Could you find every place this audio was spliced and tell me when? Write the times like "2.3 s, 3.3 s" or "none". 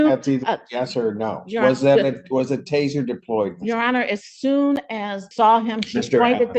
5.2 s